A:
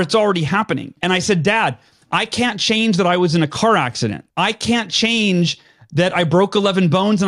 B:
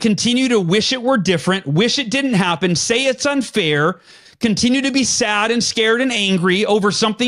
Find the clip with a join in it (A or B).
A